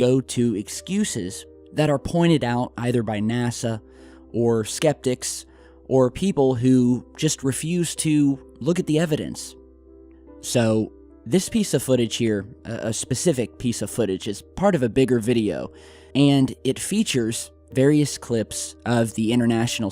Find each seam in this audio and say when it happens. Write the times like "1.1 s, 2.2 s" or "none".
11.1 s